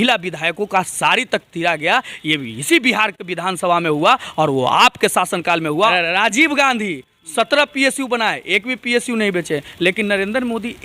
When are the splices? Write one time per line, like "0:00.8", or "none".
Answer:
0:05.9